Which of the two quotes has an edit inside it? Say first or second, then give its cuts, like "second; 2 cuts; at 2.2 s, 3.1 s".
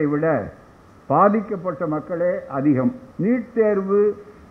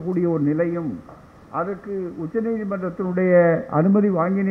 first; 1 cut; at 3.1 s